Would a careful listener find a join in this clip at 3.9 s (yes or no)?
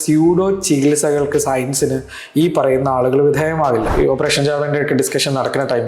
yes